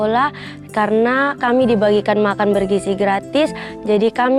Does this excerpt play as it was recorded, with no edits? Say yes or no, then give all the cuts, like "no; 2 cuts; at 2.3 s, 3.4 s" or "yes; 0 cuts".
yes; 0 cuts